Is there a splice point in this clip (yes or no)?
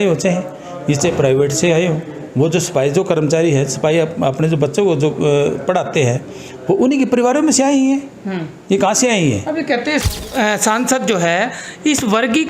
yes